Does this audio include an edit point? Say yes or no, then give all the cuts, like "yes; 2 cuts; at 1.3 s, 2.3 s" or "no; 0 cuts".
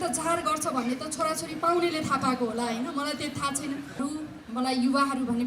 yes; 1 cut; at 3.9 s